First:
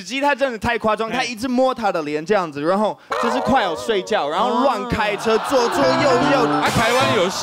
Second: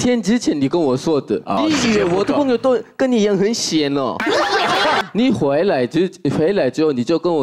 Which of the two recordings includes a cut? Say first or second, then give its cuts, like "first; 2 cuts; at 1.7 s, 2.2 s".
second; 2 cuts; at 1.6 s, 5.0 s